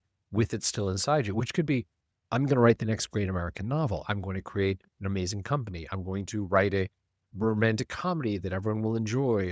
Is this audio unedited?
no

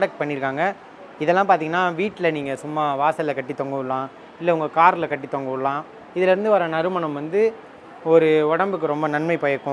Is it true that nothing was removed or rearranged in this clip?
yes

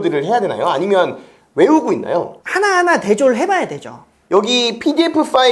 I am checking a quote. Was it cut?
yes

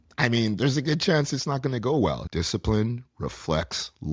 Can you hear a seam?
yes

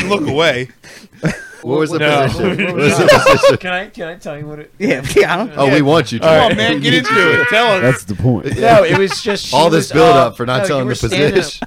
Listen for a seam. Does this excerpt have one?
yes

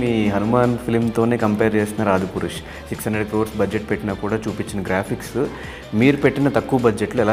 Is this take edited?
no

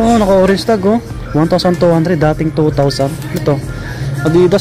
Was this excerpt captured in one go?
yes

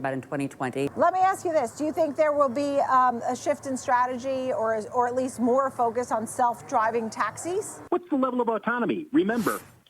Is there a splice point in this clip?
yes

